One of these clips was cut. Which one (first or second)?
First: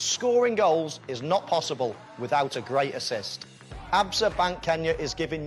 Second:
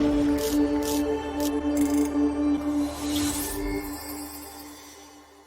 second